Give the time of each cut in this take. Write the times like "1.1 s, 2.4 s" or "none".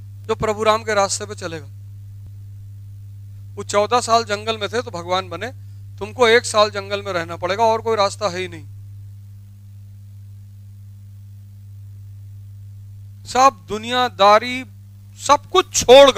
none

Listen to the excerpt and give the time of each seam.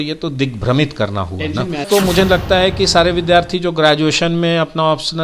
1.9 s

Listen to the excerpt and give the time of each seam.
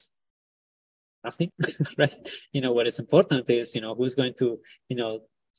none

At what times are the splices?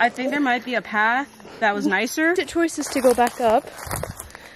2.4 s

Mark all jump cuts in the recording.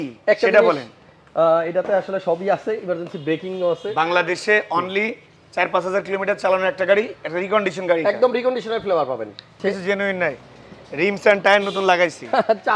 9.6 s

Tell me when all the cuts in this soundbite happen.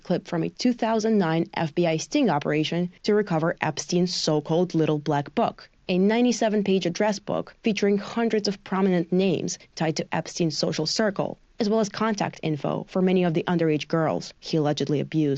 none

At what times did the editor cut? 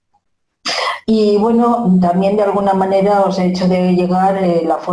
1.9 s

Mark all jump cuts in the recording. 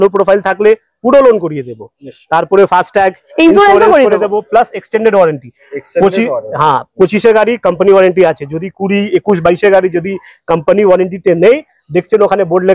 none

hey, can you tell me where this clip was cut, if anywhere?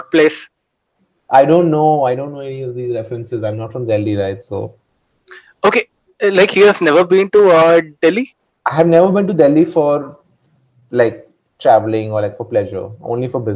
none

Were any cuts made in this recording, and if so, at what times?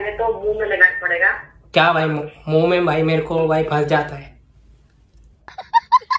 none

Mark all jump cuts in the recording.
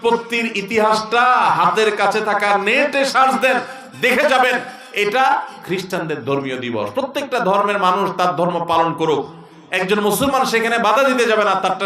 none

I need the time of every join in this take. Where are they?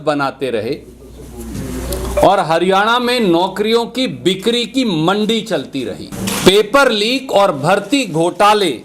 6.1 s

